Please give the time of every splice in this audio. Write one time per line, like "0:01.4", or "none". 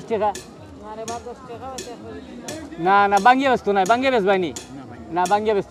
none